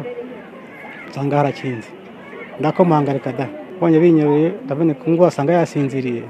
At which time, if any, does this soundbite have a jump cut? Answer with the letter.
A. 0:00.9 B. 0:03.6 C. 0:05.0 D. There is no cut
B